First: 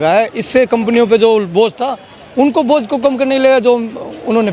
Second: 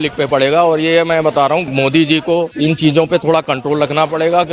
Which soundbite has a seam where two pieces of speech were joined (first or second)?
second